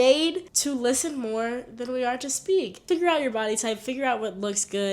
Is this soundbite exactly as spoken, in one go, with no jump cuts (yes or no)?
no